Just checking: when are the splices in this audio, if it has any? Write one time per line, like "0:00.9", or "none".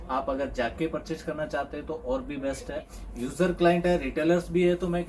0:03.0